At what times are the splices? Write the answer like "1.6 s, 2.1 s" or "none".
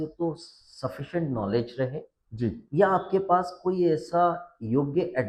none